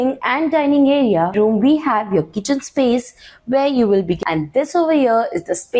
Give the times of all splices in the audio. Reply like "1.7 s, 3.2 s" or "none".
1.3 s, 4.2 s